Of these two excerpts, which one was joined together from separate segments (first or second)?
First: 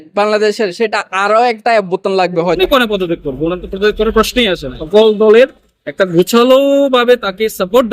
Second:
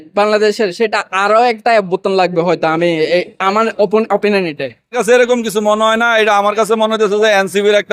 first